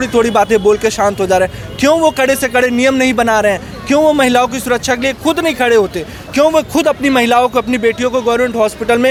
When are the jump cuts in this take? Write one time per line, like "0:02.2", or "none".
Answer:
none